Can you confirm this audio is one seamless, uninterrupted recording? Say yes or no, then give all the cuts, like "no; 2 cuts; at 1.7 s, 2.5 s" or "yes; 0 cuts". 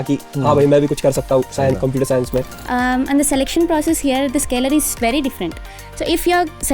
no; 1 cut; at 2.5 s